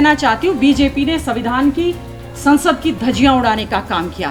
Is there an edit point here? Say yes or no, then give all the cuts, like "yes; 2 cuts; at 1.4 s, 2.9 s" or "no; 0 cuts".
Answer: no; 0 cuts